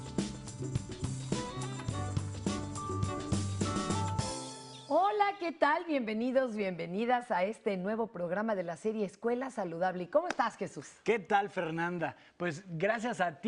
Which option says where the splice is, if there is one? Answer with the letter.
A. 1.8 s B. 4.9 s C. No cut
C